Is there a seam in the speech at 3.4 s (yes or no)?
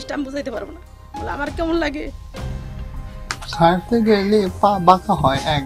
yes